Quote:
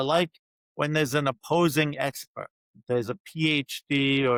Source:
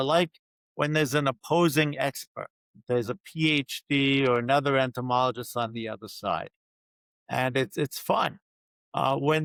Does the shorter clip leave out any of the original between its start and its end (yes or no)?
no